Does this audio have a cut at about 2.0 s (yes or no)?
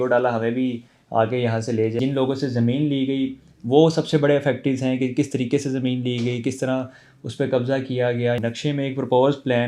yes